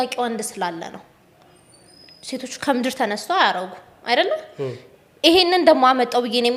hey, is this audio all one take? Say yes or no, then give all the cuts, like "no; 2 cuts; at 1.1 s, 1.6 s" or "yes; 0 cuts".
yes; 0 cuts